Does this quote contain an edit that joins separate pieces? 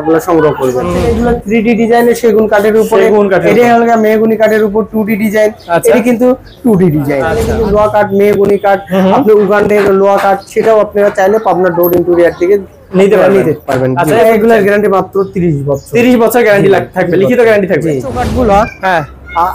yes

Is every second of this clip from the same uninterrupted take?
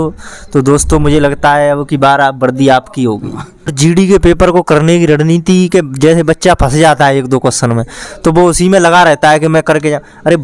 no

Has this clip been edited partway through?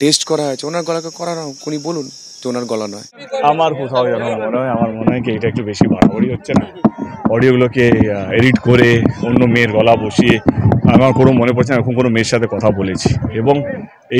yes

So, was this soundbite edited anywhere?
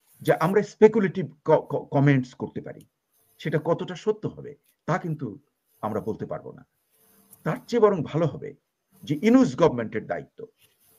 no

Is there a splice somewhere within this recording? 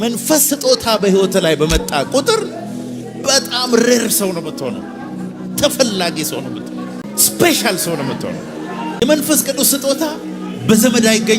yes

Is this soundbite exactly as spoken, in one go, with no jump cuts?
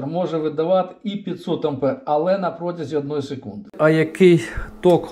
no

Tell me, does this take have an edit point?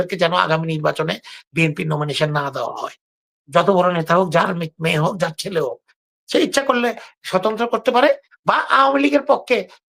no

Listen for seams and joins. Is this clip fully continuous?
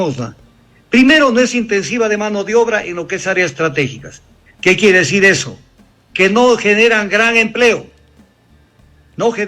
yes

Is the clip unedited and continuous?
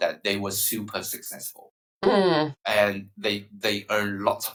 yes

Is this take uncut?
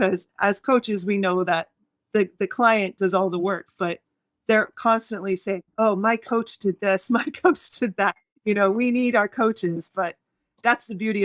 yes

